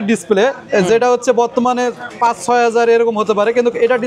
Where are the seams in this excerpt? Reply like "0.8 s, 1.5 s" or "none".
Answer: 2.0 s